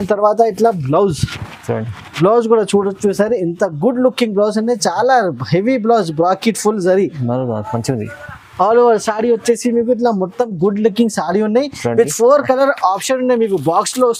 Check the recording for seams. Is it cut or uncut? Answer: uncut